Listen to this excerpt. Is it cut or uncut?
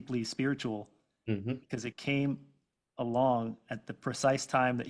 uncut